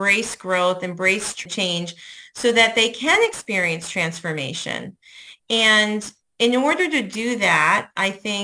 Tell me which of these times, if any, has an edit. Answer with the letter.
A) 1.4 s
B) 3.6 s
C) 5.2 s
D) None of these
A